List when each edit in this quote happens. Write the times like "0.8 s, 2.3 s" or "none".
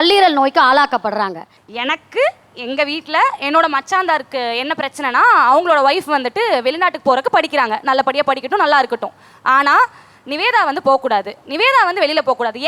1.7 s